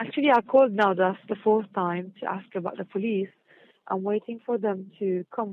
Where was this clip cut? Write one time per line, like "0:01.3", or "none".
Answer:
0:02.5